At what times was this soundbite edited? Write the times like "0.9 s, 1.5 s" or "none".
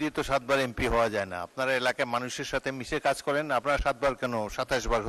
none